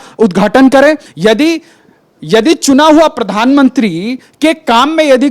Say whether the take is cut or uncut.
cut